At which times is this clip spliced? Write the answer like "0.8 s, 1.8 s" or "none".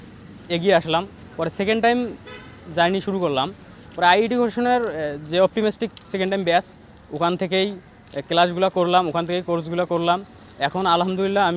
none